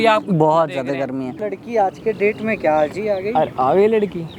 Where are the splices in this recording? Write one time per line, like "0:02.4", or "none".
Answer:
0:01.3